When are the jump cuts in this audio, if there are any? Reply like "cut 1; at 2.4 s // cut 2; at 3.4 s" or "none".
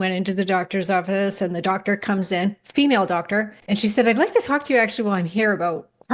cut 1; at 3.6 s